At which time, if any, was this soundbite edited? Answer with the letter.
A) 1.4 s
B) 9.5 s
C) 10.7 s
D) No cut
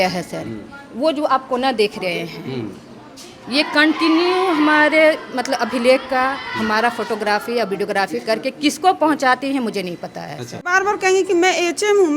C